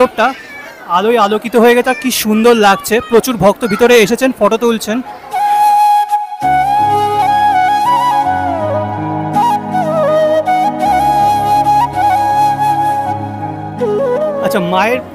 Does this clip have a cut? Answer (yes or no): no